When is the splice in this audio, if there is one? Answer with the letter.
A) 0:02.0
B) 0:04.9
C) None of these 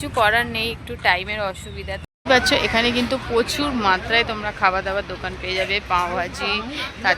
A